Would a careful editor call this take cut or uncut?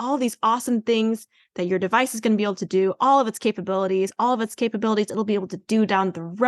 uncut